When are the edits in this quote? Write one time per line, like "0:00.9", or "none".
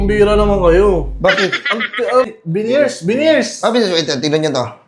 0:02.3

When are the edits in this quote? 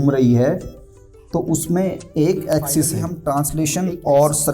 0:03.2

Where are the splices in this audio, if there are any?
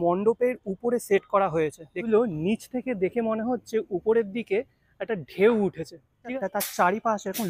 0:01.9
0:06.2

